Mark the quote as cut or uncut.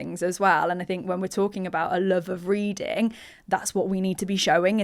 uncut